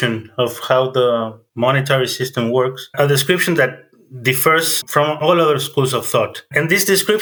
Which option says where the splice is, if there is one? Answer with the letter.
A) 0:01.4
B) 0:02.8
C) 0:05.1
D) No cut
D